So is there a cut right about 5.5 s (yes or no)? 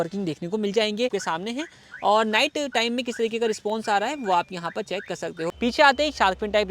yes